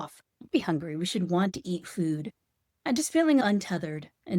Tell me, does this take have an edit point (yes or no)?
yes